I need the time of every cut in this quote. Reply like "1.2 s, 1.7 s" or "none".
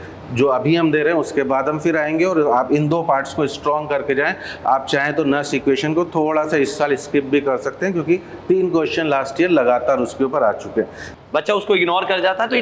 11.0 s